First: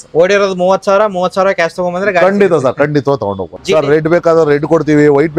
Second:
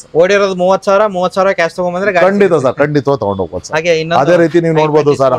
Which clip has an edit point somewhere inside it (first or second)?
first